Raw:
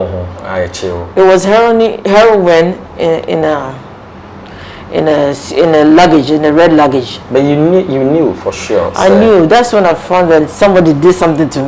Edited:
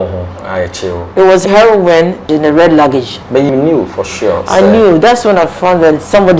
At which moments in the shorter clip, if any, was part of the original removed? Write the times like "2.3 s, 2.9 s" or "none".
1.4 s, 2.3 s, 3.5 s

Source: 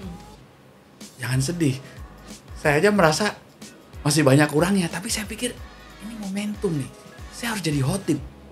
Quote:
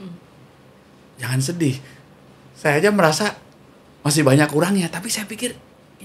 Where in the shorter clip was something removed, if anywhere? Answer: none

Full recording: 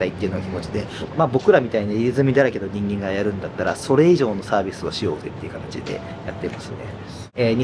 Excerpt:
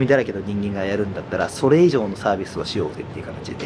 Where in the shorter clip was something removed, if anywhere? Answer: none

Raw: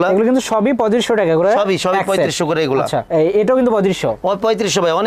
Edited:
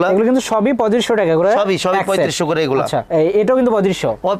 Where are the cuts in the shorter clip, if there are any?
none

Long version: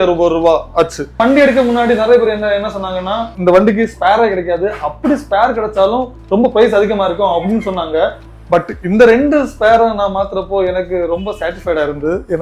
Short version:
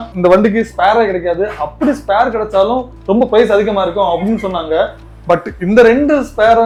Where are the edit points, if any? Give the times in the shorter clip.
none

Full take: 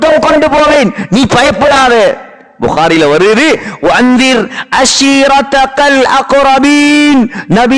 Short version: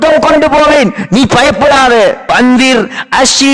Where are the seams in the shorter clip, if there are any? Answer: 2.3 s

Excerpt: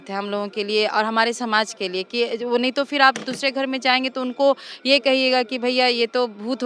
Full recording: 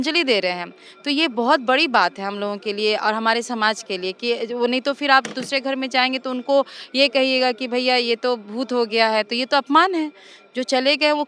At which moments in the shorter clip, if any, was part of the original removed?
none

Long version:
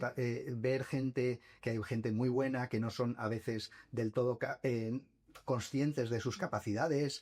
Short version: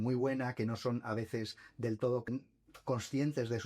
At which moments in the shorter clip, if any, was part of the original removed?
2.2 s

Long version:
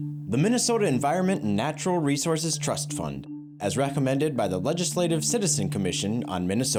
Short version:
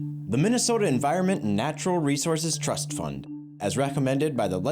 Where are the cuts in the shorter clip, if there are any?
none

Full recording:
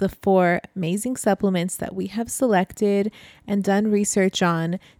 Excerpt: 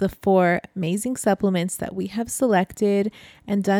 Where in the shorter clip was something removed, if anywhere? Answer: none

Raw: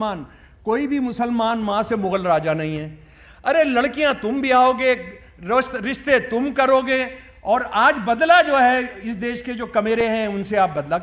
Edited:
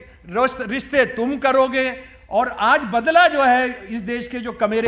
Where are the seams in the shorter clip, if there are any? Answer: none

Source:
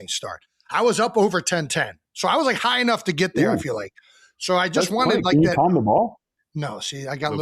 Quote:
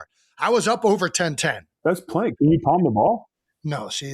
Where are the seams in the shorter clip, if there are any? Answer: 1.8 s

